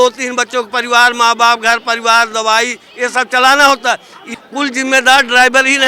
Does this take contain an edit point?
yes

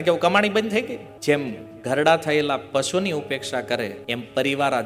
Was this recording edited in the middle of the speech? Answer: yes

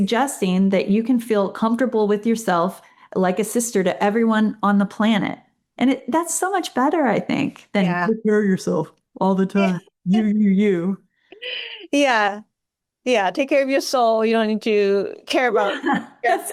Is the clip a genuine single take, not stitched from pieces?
yes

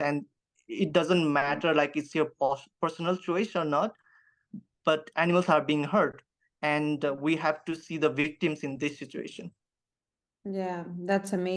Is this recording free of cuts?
yes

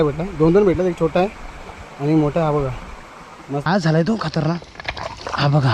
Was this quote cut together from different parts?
yes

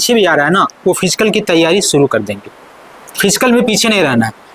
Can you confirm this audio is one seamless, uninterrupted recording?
yes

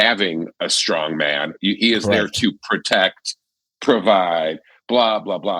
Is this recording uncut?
yes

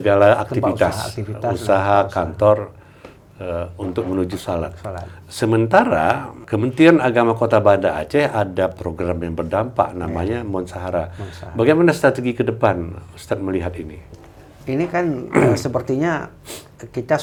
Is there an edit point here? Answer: no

